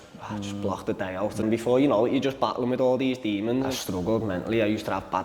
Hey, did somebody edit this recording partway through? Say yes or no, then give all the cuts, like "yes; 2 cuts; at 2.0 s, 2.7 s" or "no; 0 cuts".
yes; 2 cuts; at 1.4 s, 3.7 s